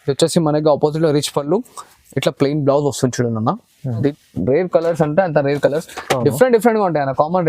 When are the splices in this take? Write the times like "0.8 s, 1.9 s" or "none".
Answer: 4.1 s